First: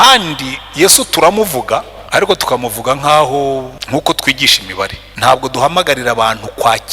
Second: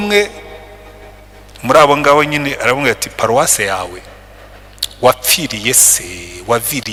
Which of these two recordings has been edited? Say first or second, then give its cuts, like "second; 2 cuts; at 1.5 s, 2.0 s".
first; 3 cuts; at 2.0 s, 3.8 s, 5.0 s